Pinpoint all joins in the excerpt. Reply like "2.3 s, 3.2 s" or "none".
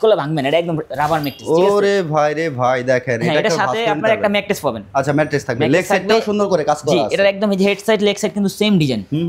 none